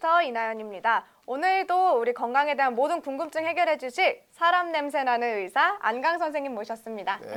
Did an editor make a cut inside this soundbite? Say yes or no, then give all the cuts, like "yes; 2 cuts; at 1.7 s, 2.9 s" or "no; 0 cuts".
no; 0 cuts